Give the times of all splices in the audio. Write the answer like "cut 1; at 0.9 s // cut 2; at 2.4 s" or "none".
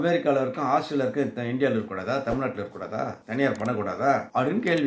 none